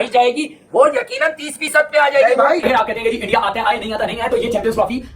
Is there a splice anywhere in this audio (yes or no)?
yes